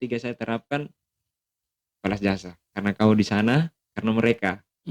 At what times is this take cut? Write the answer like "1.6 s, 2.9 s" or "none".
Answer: 2.6 s